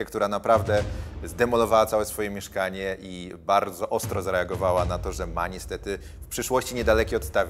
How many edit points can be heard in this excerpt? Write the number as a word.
zero